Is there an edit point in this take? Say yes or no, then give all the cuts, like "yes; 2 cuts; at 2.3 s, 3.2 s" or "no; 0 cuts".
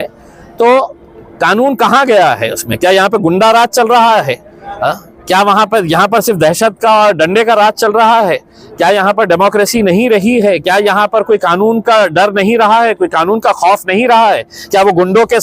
no; 0 cuts